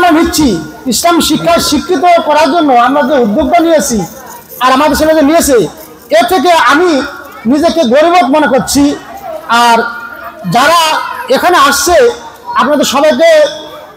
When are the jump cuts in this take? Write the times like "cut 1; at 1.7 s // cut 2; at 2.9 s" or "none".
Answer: none